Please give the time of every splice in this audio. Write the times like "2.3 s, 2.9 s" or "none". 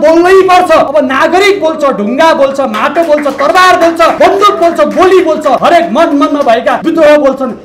0.9 s, 4.1 s, 5.6 s, 6.8 s